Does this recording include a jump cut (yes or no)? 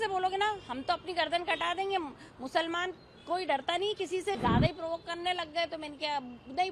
yes